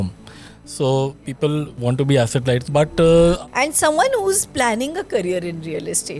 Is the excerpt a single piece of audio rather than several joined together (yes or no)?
no